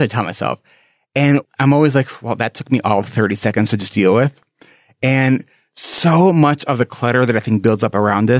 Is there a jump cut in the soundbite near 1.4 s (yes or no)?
yes